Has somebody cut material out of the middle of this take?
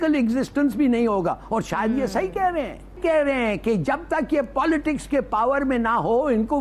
yes; 1 cut; at 3.0 s

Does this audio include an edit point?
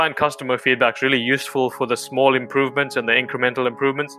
no; 0 cuts

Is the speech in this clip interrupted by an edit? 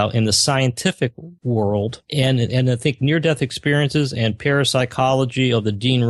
yes; 2 cuts; at 1.3 s, 2.0 s

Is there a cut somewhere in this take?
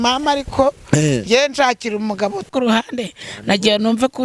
yes; 1 cut; at 2.5 s

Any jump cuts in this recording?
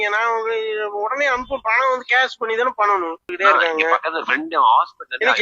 yes; 1 cut; at 3.3 s

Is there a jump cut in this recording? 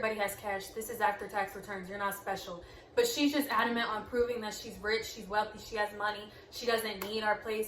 no; 0 cuts

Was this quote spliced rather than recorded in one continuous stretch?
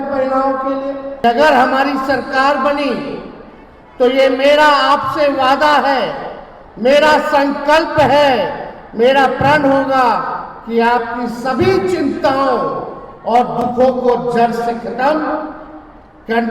yes; 1 cut; at 1.2 s

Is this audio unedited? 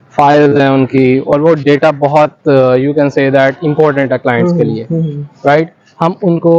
yes; 0 cuts

